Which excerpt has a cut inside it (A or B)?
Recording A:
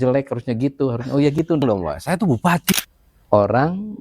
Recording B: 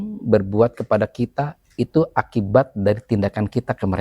A